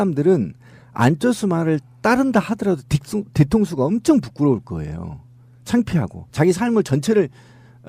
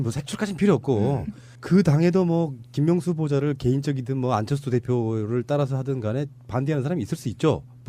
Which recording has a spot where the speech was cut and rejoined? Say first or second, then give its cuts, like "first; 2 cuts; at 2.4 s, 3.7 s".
first; 1 cut; at 1.2 s